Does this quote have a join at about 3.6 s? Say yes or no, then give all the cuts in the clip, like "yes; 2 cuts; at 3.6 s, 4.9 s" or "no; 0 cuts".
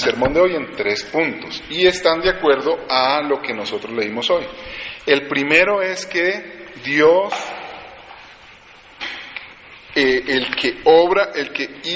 yes; 1 cut; at 3.6 s